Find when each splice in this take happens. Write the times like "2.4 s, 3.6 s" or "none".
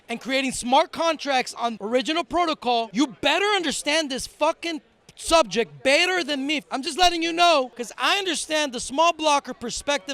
1.6 s, 2.9 s, 6.7 s, 7.8 s